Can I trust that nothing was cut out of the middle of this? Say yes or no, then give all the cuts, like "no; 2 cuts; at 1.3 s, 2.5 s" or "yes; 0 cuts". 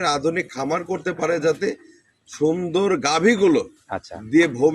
yes; 0 cuts